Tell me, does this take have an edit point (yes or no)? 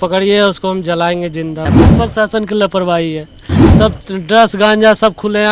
yes